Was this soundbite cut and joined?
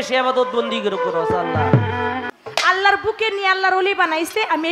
yes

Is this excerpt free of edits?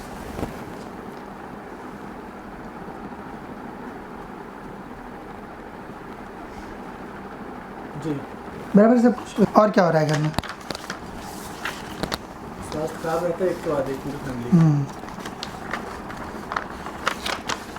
yes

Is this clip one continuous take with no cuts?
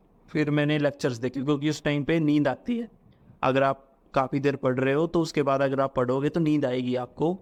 yes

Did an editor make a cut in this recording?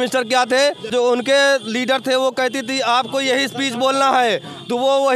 yes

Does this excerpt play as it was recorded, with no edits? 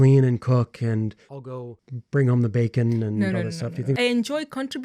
no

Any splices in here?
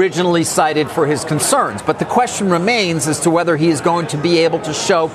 no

